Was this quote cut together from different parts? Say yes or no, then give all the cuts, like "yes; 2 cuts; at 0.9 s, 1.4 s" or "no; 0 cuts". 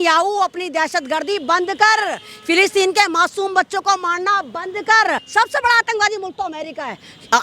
yes; 1 cut; at 5.2 s